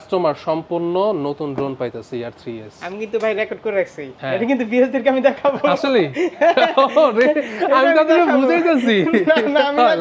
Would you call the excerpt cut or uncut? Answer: uncut